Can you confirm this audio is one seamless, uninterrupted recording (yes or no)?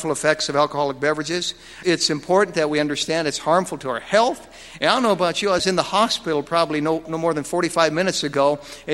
no